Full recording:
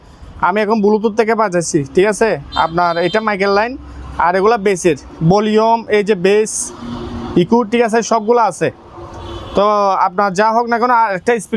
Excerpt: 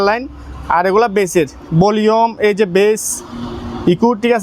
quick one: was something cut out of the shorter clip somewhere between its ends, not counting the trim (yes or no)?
no